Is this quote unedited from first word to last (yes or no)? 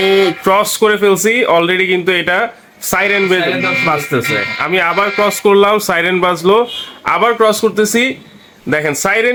yes